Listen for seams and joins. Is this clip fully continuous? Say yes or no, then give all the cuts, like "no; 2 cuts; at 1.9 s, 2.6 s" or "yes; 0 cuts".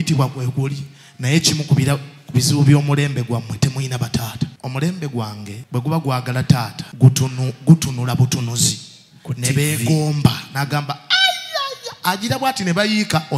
no; 3 cuts; at 4.6 s, 5.5 s, 6.8 s